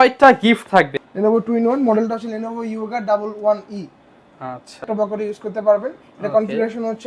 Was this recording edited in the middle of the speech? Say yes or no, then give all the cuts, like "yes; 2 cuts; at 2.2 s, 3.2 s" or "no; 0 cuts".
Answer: yes; 2 cuts; at 1.0 s, 4.9 s